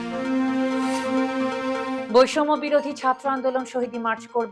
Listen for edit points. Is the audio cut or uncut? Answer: cut